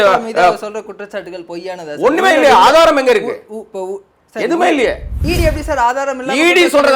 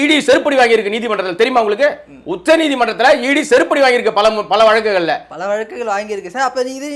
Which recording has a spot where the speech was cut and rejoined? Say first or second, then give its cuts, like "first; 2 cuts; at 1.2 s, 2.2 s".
first; 1 cut; at 5.2 s